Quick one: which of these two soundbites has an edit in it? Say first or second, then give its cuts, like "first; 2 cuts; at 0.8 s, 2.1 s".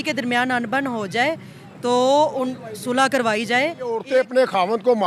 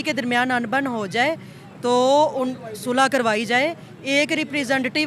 first; 1 cut; at 4.0 s